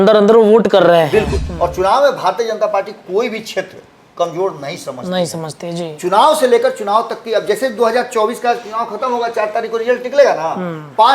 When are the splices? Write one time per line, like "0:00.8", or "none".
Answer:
0:01.4

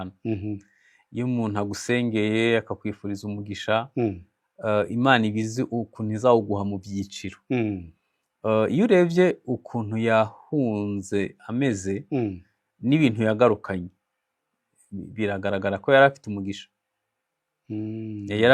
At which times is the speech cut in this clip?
none

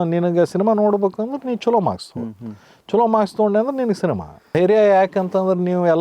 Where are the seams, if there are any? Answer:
0:04.4

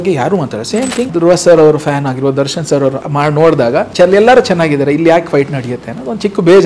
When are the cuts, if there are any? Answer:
0:01.1
0:03.0
0:03.9

